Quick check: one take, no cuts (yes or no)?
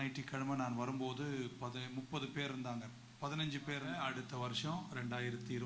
no